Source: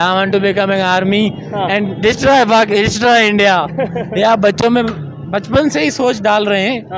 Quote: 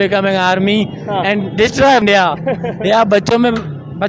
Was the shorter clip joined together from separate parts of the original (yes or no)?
yes